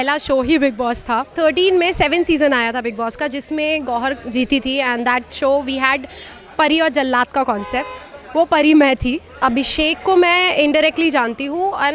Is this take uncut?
no; 2 cuts; at 1.3 s, 9.4 s

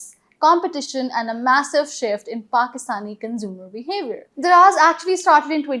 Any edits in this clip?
yes; 1 cut; at 4.3 s

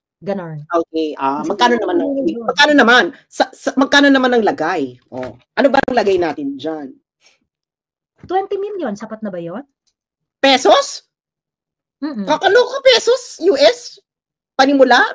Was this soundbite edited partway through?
no; 0 cuts

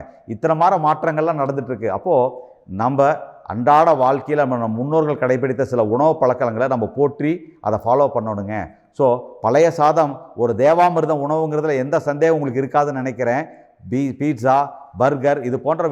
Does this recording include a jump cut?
no; 0 cuts

